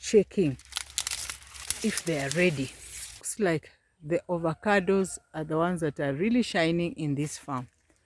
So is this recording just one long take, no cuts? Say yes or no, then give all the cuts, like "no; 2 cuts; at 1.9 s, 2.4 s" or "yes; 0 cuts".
no; 1 cut; at 3.3 s